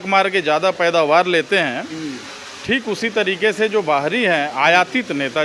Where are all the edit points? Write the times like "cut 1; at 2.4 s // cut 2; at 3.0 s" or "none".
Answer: none